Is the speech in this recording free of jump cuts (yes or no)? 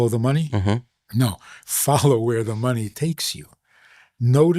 no